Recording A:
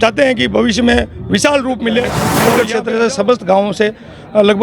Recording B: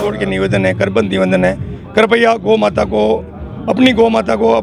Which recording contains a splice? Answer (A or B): A